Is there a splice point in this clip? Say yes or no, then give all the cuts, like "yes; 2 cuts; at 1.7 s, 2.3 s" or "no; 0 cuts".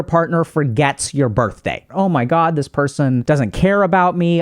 yes; 2 cuts; at 1.8 s, 3.2 s